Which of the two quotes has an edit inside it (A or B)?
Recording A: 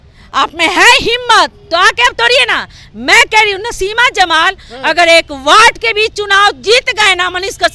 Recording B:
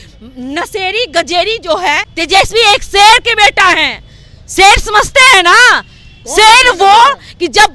B